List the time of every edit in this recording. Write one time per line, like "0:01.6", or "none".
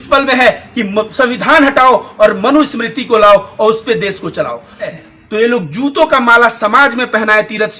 0:05.0